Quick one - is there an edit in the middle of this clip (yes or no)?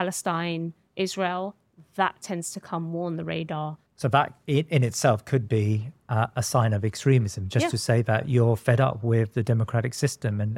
yes